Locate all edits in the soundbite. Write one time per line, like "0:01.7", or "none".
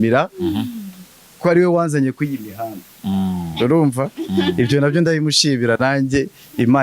none